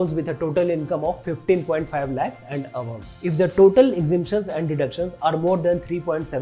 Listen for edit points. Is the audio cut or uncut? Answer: uncut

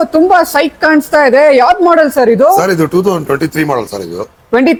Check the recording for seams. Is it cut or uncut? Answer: uncut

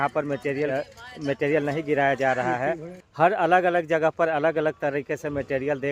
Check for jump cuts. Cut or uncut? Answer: uncut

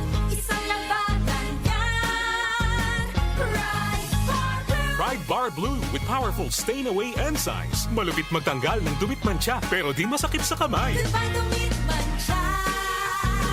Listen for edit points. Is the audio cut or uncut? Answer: uncut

